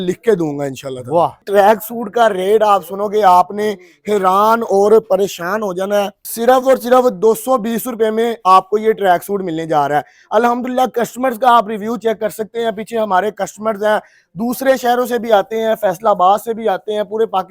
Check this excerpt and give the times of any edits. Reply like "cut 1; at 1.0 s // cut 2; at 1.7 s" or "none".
cut 1; at 1.4 s // cut 2; at 6.2 s